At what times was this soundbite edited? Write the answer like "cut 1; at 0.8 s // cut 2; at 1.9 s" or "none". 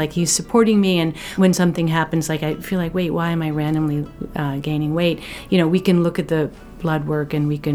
cut 1; at 1.2 s